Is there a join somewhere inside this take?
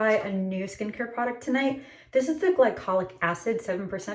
no; 0 cuts

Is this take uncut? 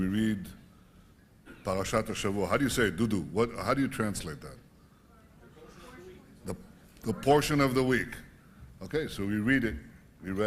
no; 1 cut; at 3.8 s

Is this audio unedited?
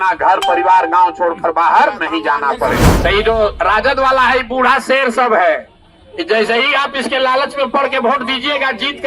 no; 1 cut; at 2.9 s

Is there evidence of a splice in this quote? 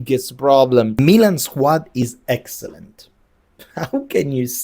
yes; 1 cut; at 0.9 s

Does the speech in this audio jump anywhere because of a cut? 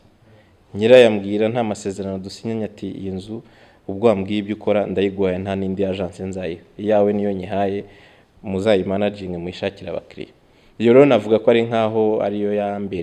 no; 0 cuts

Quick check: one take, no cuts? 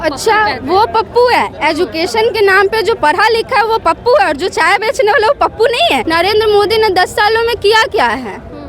no; 1 cut; at 6.0 s

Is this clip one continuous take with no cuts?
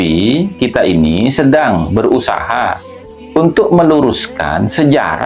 yes; 0 cuts

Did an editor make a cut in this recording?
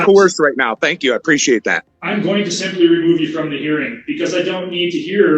yes; 1 cut; at 1.9 s

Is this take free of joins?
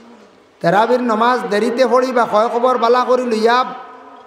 yes; 0 cuts

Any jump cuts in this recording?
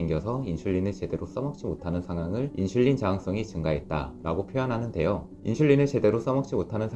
no; 0 cuts

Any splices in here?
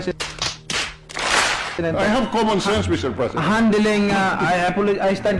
no; 0 cuts

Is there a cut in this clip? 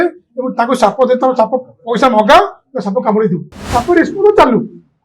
yes; 1 cut; at 3.6 s

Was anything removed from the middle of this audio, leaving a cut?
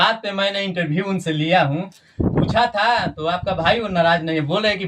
no; 0 cuts

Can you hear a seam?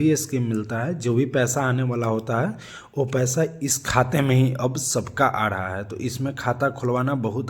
no; 0 cuts

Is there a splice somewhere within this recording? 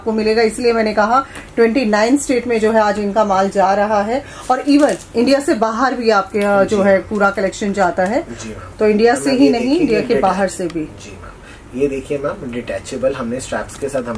no; 0 cuts

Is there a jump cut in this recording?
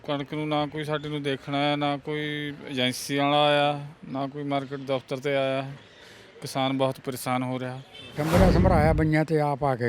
yes; 1 cut; at 8.2 s

